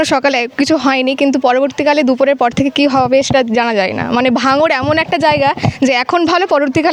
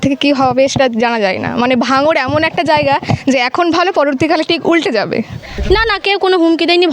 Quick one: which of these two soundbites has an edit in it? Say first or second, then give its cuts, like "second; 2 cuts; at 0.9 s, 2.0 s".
second; 1 cut; at 5.5 s